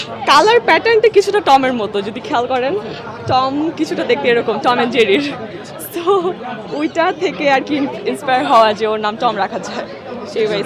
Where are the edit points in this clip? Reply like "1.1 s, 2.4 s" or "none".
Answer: none

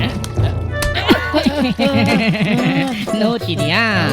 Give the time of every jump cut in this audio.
none

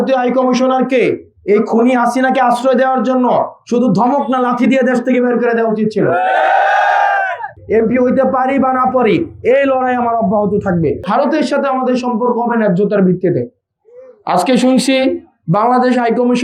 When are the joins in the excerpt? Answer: 7.6 s, 11.0 s

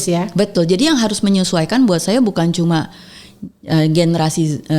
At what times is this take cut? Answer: none

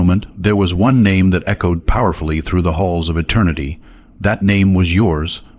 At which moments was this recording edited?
none

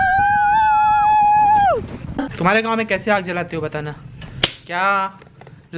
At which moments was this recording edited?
1.9 s

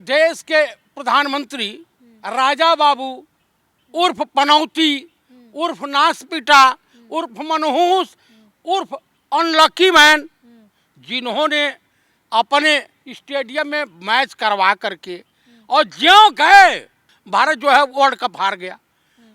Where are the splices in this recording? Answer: none

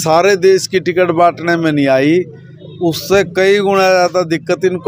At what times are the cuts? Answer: none

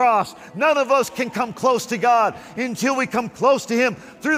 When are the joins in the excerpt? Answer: none

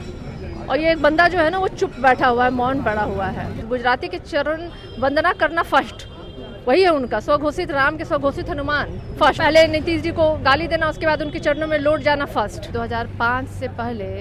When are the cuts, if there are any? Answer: 3.6 s, 9.4 s, 12.7 s

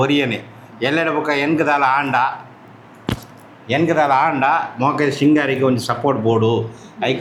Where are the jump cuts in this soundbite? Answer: none

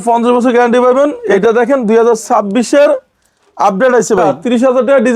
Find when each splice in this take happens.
1.2 s, 4.3 s

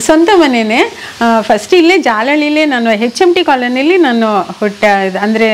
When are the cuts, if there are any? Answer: none

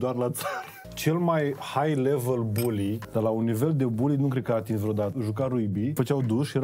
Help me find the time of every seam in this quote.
none

